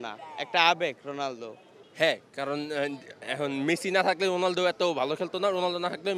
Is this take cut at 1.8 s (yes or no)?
yes